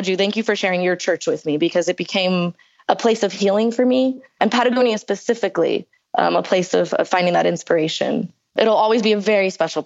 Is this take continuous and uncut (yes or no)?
no